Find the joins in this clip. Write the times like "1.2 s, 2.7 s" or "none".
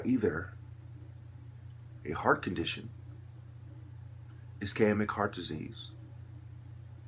5.2 s